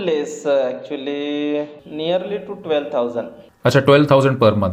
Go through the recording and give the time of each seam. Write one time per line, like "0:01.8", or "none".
none